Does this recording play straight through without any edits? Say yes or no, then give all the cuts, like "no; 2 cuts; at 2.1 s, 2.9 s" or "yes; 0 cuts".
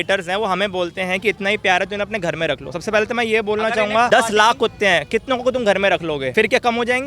no; 2 cuts; at 4.1 s, 6.3 s